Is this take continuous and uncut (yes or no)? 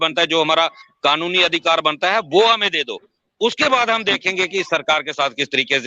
no